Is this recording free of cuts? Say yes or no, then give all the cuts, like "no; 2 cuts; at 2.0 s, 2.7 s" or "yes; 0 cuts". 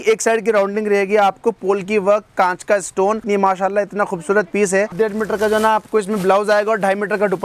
no; 2 cuts; at 3.2 s, 4.9 s